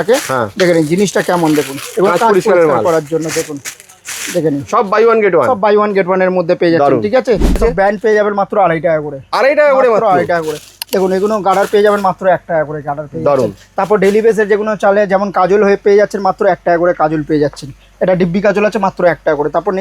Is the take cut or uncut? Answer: cut